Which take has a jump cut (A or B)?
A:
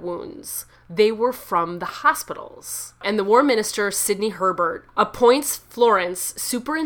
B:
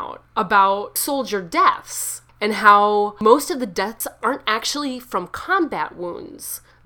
A